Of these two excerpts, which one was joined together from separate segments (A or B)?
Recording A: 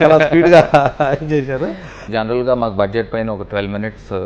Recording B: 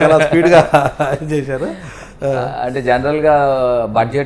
A